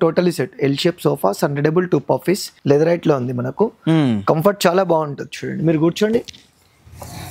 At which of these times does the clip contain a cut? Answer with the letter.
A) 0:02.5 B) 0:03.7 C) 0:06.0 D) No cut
A